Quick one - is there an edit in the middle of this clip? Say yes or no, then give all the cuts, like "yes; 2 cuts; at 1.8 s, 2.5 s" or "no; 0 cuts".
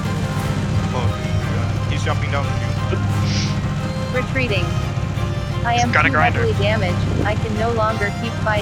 no; 0 cuts